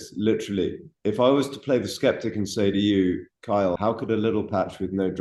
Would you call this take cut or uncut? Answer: uncut